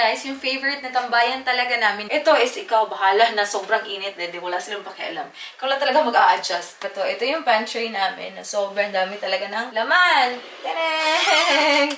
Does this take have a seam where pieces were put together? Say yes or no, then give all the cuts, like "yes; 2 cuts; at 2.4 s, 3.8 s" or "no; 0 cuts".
yes; 3 cuts; at 2.0 s, 6.9 s, 9.6 s